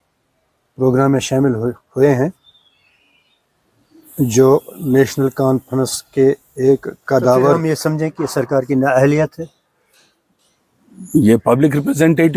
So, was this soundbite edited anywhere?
yes; 1 cut; at 7.6 s

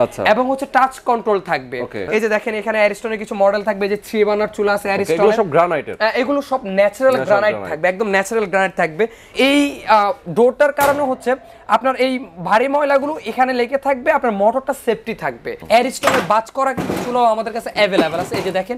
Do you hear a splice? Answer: yes; 3 cuts; at 2.0 s, 9.3 s, 15.5 s

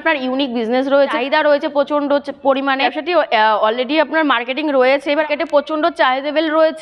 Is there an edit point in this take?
yes; 3 cuts; at 1.2 s, 2.9 s, 5.2 s

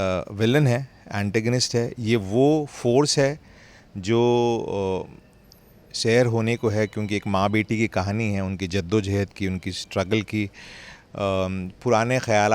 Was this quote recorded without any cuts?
yes; 0 cuts

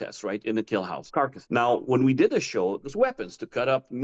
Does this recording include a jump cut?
yes; 2 cuts; at 1.0 s, 2.8 s

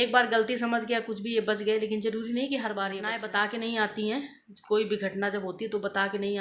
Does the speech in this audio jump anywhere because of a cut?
yes; 1 cut; at 3.1 s

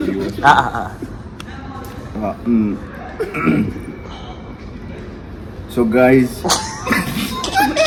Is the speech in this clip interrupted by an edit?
no; 0 cuts

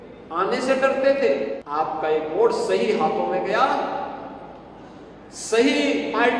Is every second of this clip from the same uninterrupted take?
no; 1 cut; at 1.6 s

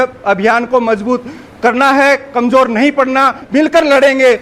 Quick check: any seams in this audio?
yes; 1 cut; at 3.4 s

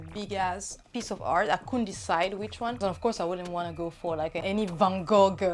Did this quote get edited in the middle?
yes; 3 cuts; at 0.8 s, 2.8 s, 4.4 s

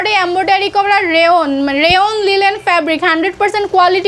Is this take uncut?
yes; 0 cuts

